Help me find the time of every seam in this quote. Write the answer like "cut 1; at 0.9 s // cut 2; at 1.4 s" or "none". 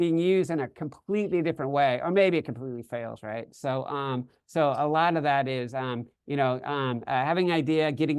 none